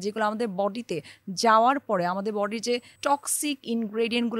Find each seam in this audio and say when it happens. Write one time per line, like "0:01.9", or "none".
0:03.0